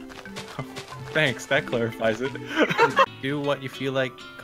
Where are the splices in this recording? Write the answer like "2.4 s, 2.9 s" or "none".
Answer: 3.1 s